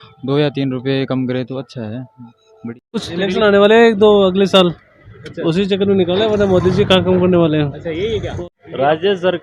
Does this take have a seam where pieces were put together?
yes; 2 cuts; at 2.8 s, 8.4 s

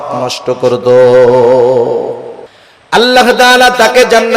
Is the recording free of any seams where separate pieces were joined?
no; 1 cut; at 3.0 s

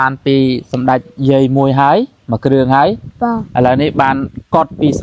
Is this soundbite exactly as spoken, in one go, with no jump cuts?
yes; 0 cuts

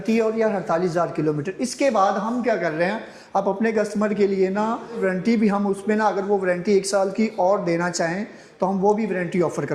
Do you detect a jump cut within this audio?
yes; 1 cut; at 5.0 s

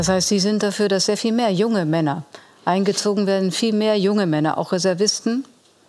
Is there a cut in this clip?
no; 0 cuts

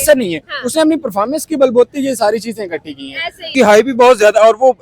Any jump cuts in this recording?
yes; 1 cut; at 3.5 s

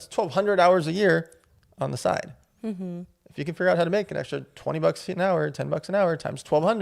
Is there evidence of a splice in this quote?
no; 0 cuts

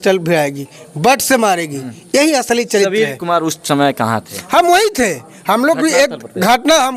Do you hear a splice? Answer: no; 0 cuts

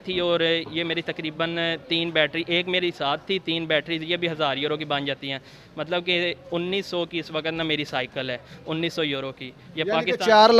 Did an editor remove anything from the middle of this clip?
no; 0 cuts

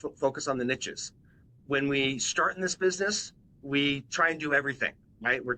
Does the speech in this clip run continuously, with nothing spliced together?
no; 1 cut; at 1.6 s

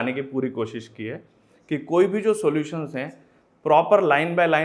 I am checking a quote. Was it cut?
no; 0 cuts

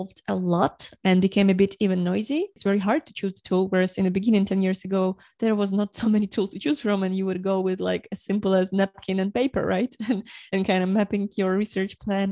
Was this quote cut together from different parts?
yes; 1 cut; at 2.6 s

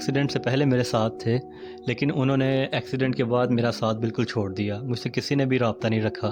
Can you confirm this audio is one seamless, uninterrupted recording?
yes; 0 cuts

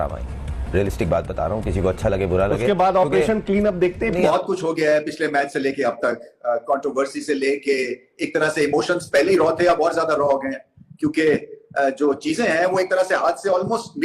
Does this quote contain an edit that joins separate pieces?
yes; 1 cut; at 4.2 s

